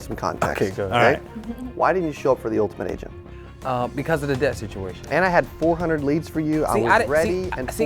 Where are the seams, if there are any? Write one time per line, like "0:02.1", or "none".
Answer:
0:05.1